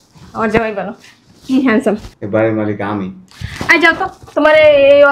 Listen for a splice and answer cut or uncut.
cut